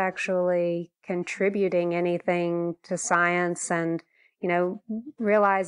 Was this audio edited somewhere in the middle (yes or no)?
no